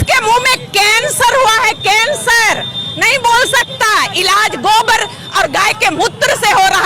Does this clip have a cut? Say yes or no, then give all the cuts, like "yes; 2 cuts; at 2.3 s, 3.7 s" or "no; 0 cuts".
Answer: no; 0 cuts